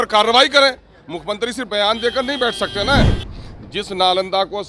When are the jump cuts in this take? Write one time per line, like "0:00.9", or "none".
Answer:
0:03.2

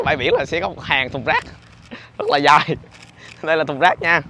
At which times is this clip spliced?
none

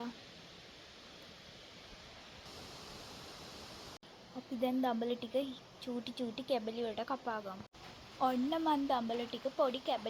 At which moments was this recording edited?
0:04.0
0:07.6

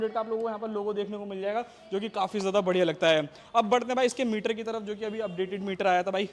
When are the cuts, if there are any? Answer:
none

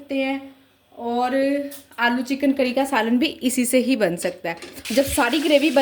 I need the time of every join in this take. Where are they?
0:04.9

